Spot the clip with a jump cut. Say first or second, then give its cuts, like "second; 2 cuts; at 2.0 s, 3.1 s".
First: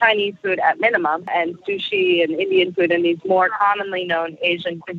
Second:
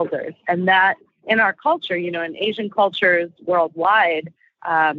first; 1 cut; at 1.3 s